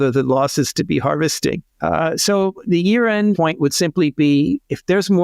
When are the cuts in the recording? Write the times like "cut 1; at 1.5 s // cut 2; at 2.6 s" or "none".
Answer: cut 1; at 1.7 s // cut 2; at 3.4 s